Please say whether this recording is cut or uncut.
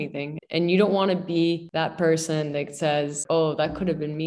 cut